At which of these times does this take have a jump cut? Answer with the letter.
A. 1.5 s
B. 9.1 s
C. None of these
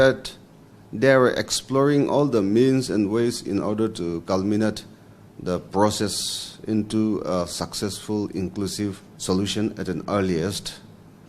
B